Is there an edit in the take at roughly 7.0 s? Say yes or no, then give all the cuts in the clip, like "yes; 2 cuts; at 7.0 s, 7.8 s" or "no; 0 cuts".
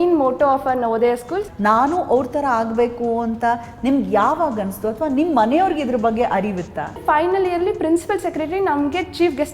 yes; 2 cuts; at 1.5 s, 7.0 s